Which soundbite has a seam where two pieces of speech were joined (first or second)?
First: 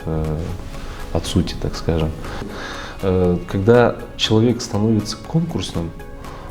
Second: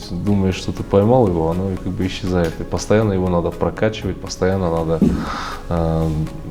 first